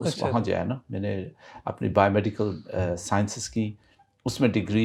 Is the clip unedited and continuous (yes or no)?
yes